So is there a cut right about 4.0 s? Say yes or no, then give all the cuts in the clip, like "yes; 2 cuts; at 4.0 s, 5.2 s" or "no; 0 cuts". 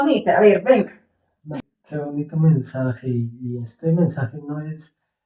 no; 1 cut; at 1.5 s